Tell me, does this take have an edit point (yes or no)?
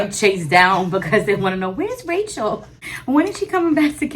yes